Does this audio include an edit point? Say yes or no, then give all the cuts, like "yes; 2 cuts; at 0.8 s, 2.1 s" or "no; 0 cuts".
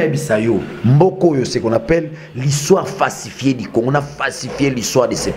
no; 0 cuts